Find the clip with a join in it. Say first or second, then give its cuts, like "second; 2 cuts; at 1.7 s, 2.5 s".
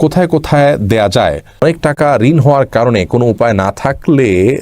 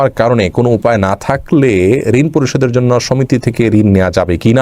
first; 1 cut; at 1.6 s